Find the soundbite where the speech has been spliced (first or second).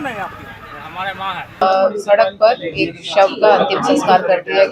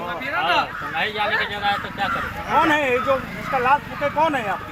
first